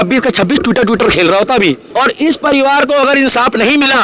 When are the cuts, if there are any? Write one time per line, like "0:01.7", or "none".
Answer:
0:01.8

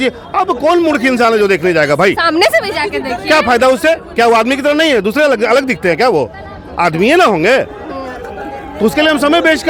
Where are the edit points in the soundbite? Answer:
none

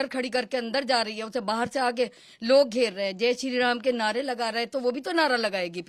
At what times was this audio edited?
none

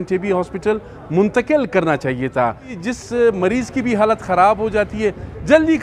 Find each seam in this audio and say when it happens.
0:02.8

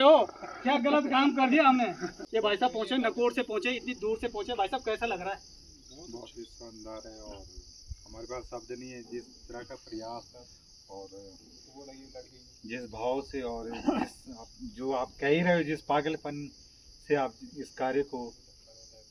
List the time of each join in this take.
0:02.2

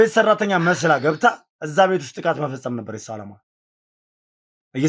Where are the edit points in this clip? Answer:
none

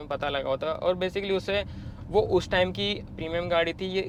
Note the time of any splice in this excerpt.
none

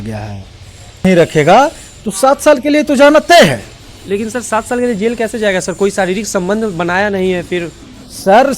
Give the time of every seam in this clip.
0:01.0

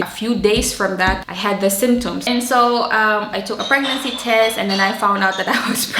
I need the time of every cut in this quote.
none

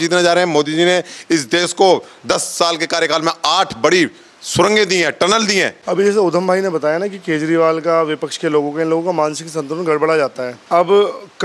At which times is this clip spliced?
0:05.8
0:10.5

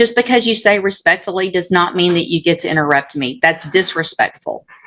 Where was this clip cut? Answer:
none

